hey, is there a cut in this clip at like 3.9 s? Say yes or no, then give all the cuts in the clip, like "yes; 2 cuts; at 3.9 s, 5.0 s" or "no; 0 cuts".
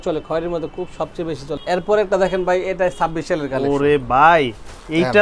no; 1 cut; at 1.6 s